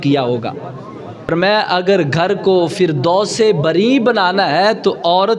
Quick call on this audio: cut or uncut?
cut